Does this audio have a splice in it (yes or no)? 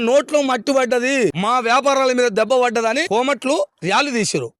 yes